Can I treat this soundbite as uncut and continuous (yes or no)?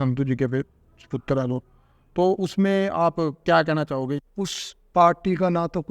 no